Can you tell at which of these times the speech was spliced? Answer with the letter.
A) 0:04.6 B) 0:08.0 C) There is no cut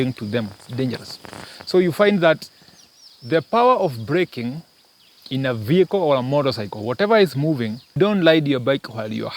B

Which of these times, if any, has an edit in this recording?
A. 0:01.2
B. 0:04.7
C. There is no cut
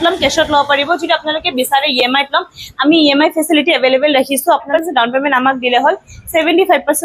B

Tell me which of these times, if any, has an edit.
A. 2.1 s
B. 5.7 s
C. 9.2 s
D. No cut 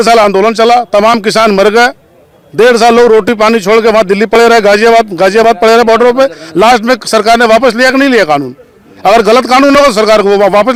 D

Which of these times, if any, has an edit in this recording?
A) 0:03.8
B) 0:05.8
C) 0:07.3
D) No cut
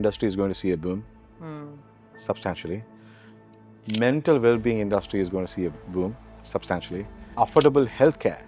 B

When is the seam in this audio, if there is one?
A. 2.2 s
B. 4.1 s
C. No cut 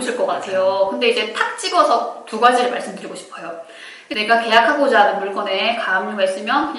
B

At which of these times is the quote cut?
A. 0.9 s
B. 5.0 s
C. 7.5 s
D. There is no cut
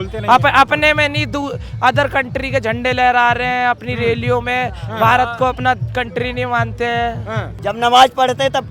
C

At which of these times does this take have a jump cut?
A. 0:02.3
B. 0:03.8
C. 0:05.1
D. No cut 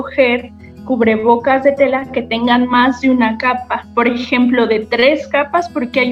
B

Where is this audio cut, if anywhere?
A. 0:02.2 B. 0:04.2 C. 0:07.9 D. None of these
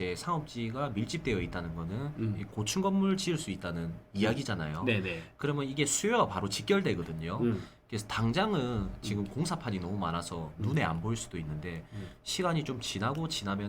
D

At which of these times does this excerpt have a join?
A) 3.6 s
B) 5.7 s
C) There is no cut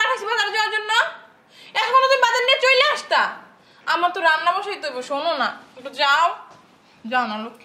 C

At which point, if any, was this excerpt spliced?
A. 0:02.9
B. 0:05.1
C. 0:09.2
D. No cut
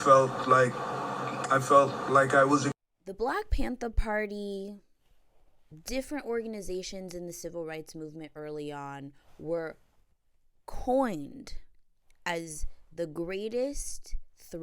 A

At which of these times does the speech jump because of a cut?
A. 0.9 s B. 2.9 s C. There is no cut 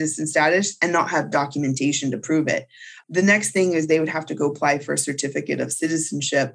B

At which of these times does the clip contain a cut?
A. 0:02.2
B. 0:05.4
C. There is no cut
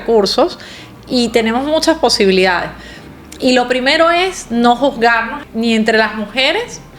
B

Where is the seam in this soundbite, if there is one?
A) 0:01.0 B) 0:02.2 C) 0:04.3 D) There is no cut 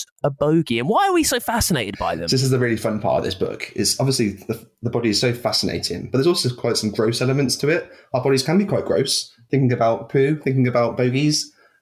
B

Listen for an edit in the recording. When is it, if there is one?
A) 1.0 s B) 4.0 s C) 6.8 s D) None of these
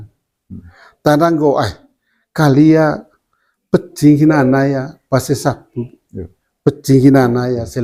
D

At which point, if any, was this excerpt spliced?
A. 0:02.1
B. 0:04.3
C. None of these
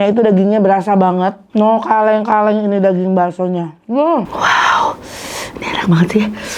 B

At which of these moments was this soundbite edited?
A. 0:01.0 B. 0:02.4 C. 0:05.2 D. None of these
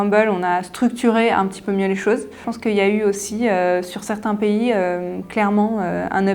B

